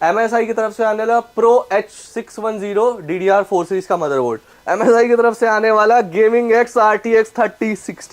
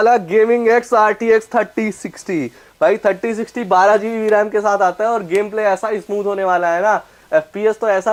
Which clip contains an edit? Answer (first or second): first